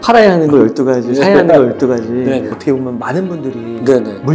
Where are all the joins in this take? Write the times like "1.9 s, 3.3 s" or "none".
2.5 s